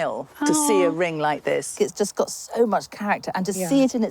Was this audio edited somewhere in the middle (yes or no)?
yes